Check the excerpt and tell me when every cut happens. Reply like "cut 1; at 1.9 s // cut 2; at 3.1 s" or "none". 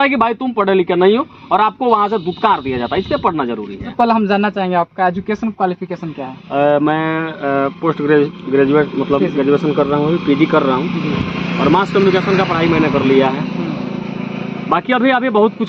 cut 1; at 3.8 s